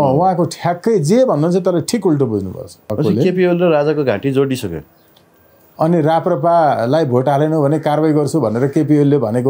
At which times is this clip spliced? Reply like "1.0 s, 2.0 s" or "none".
2.9 s